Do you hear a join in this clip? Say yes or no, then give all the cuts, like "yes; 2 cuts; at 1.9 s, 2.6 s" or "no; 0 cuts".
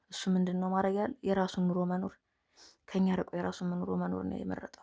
no; 0 cuts